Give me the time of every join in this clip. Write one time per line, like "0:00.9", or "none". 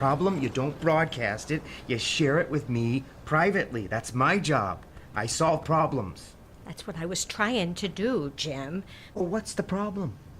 0:09.2